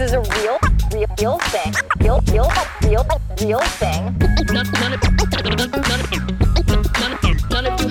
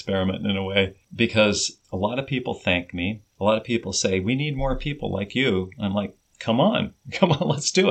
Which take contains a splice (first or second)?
second